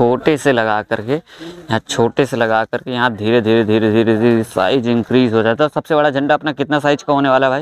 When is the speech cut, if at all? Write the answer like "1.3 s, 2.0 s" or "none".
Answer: none